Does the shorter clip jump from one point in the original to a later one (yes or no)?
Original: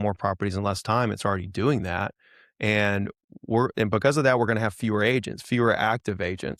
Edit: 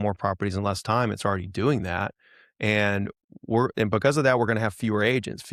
no